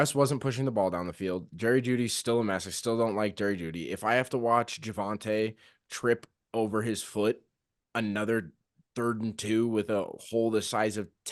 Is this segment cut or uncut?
uncut